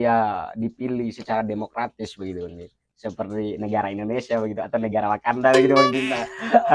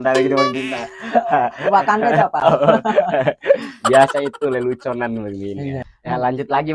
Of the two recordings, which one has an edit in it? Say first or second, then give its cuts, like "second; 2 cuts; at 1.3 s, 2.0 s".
second; 1 cut; at 5.8 s